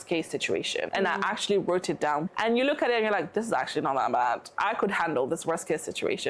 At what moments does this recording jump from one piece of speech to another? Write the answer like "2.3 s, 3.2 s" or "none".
0.9 s, 2.3 s